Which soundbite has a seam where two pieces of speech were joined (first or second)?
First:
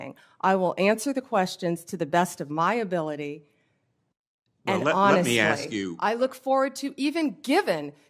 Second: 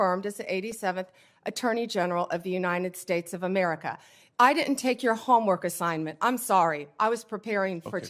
first